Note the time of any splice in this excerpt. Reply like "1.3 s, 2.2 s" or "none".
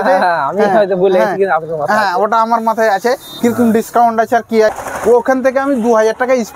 4.7 s